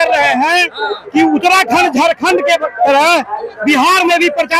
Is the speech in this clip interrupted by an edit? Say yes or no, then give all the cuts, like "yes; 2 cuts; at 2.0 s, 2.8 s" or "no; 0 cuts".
no; 0 cuts